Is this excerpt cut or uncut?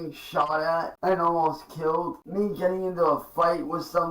cut